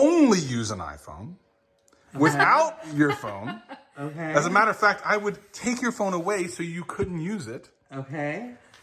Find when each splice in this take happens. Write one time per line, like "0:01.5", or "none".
none

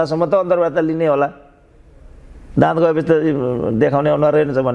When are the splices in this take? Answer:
none

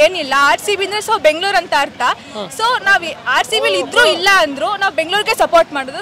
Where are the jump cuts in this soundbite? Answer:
none

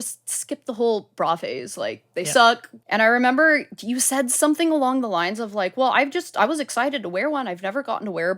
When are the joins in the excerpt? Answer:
0:02.7

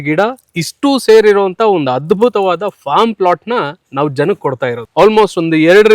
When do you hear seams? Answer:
0:04.8

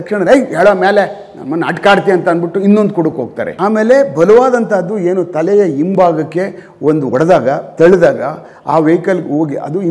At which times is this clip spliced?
0:03.4

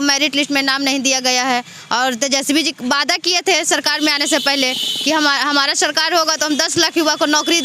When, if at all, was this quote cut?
none

